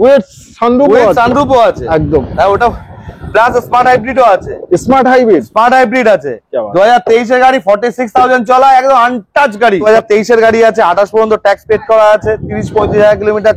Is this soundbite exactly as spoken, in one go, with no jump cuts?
no; 1 cut; at 9.8 s

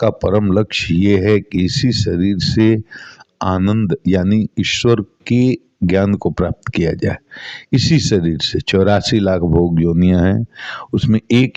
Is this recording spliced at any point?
no; 0 cuts

